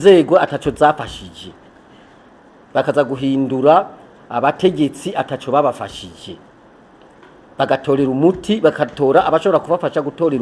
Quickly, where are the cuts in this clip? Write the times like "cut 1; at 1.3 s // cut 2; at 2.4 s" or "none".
none